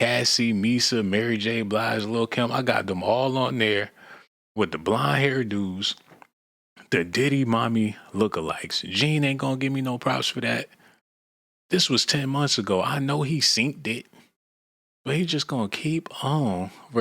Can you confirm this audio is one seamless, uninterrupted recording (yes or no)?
yes